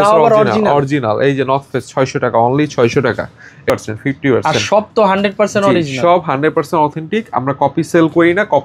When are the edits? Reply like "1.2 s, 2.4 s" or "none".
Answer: 3.7 s